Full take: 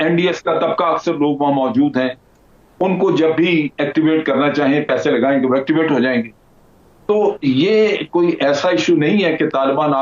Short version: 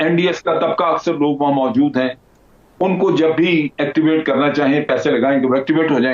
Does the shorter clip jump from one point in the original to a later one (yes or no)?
no